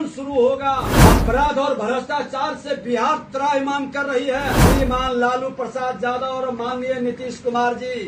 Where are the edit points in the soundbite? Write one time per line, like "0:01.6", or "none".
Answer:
0:00.9
0:04.6